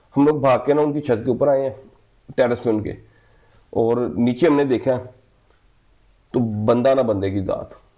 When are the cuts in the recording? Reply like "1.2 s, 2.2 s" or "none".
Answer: none

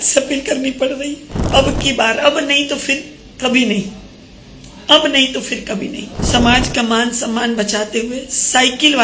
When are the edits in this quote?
1.3 s, 6.1 s

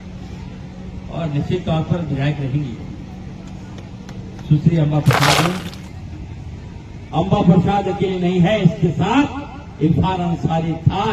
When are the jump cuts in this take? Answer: 5.9 s

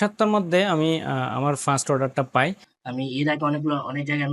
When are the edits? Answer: 2.7 s

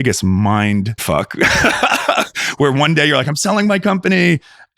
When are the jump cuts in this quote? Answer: 1.0 s

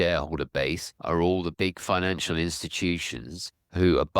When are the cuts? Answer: 0.9 s, 1.5 s

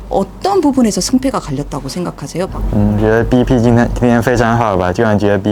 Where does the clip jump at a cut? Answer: 2.5 s

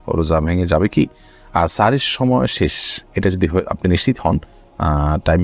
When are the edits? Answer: none

